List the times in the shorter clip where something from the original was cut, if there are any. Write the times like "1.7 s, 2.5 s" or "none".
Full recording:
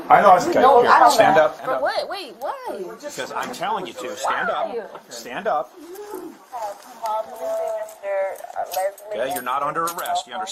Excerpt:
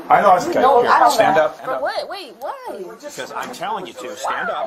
none